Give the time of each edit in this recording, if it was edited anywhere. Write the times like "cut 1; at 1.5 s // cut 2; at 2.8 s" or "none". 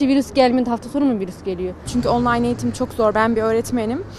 cut 1; at 1.8 s